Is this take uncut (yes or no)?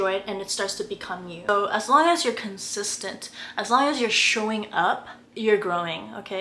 no